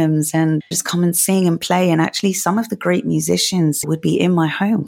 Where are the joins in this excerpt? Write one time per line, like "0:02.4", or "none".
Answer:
0:03.9